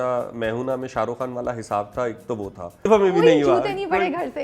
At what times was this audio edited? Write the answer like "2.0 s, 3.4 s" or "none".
2.9 s